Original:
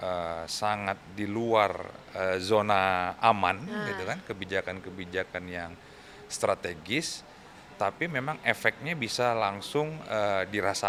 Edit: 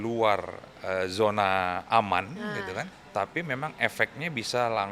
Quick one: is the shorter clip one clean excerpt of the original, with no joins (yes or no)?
no